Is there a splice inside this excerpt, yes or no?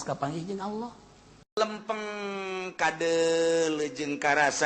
yes